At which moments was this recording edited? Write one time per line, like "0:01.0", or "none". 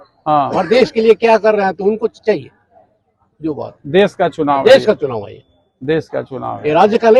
none